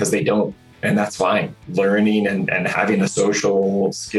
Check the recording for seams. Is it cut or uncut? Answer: uncut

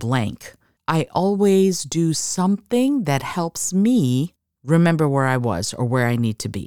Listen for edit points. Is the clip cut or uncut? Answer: uncut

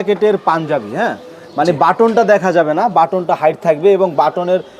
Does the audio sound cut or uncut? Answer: uncut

